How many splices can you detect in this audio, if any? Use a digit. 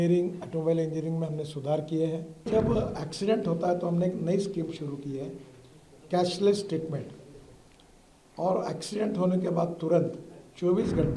1